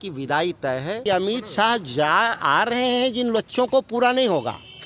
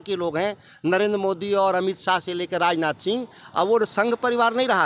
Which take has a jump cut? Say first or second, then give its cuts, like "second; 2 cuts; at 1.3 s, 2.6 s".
first; 1 cut; at 1.0 s